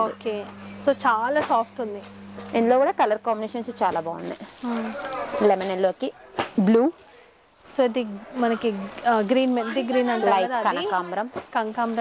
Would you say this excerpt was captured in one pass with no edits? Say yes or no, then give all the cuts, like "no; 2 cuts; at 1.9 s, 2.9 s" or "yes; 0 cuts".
yes; 0 cuts